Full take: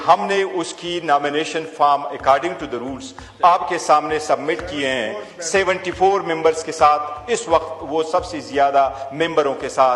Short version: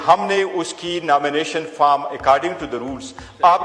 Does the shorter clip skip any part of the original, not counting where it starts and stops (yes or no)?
no